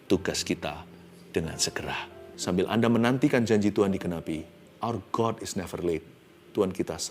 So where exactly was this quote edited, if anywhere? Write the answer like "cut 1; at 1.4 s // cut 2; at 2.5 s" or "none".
cut 1; at 2.2 s // cut 2; at 4.6 s